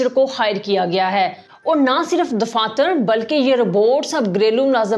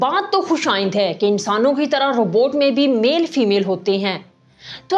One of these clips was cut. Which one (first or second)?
first